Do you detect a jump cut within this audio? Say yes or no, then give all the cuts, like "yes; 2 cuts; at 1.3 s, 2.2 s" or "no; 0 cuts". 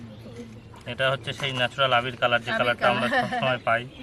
no; 0 cuts